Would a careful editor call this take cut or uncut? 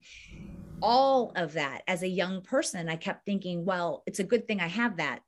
uncut